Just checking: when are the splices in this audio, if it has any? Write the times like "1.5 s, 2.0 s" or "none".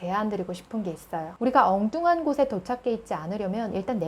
1.3 s